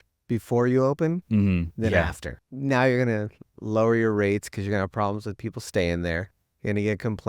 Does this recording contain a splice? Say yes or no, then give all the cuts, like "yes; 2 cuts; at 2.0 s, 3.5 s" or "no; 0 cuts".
yes; 1 cut; at 2.2 s